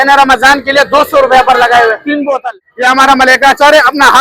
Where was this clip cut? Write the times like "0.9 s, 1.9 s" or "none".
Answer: 2.6 s

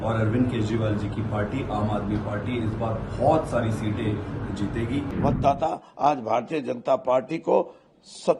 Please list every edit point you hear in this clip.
5.1 s

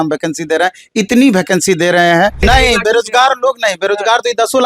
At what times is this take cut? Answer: 2.4 s

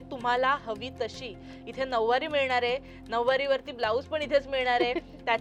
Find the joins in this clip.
none

